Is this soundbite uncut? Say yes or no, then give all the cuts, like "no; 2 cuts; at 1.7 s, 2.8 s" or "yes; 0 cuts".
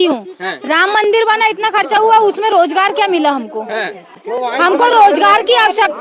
yes; 0 cuts